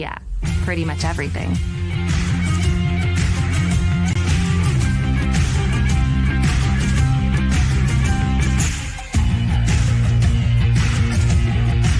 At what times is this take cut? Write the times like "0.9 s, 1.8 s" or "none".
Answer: 6.5 s

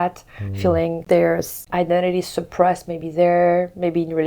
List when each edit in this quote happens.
1.0 s, 1.6 s

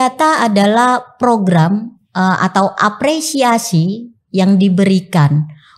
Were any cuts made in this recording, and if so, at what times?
none

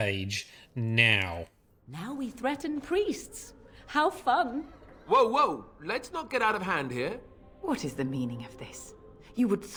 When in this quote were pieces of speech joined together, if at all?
none

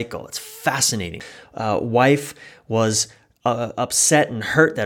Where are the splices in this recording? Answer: 1.2 s

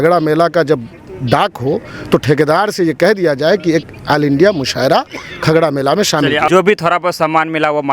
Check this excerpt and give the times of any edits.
6.5 s

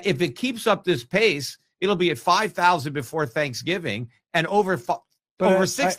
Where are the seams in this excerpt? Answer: none

